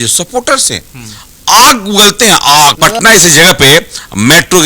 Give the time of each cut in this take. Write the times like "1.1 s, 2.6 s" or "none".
2.8 s